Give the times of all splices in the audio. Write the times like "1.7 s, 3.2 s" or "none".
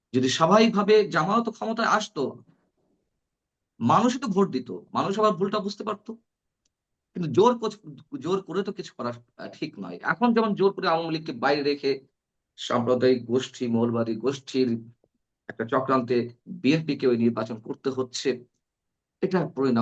none